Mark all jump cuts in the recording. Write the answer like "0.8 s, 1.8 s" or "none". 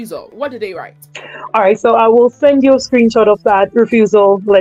none